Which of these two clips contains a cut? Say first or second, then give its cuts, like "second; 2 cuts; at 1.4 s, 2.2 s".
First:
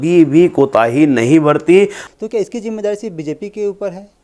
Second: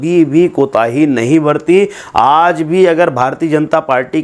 first; 1 cut; at 2.0 s